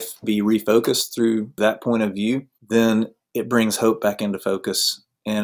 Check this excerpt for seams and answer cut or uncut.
cut